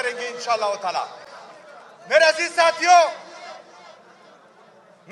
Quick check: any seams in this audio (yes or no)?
no